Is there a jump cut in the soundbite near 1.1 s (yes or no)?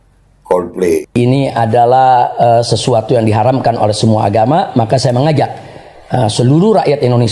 yes